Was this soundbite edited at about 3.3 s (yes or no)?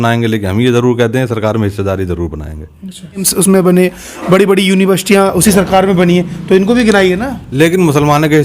yes